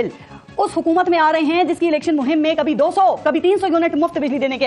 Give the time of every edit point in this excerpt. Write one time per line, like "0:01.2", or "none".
none